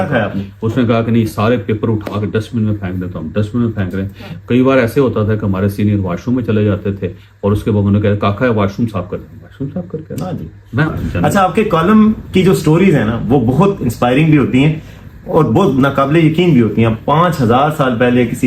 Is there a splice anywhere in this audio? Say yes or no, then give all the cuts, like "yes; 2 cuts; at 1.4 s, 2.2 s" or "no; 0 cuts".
yes; 1 cut; at 10.9 s